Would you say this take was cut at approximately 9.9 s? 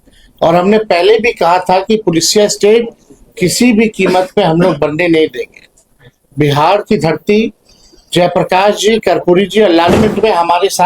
yes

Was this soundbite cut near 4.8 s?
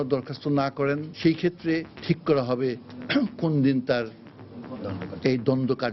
no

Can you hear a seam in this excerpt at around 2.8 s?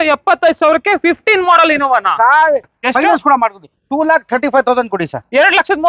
yes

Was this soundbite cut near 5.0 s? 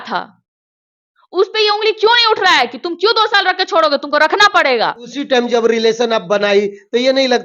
yes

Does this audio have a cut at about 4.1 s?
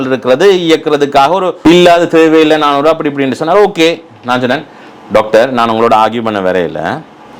no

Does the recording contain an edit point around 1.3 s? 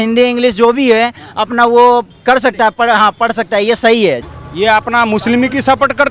no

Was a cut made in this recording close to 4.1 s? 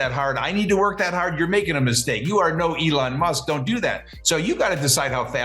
yes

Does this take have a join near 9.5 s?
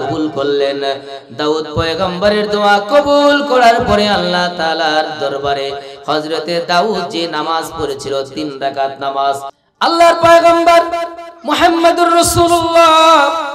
yes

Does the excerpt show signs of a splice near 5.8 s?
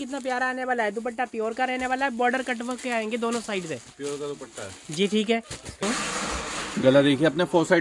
yes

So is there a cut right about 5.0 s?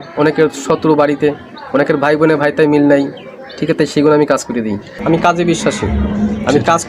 yes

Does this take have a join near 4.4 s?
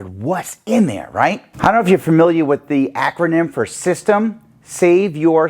no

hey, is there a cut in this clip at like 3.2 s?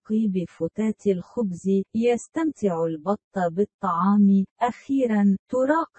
no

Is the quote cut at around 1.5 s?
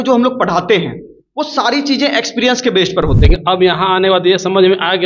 no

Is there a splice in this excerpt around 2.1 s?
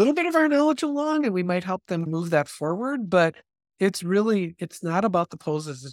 yes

